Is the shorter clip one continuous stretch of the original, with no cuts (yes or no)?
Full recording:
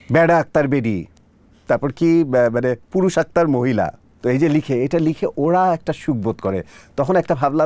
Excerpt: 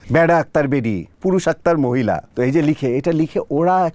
no